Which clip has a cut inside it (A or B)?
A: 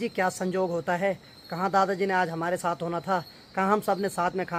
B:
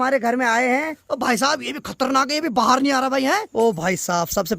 B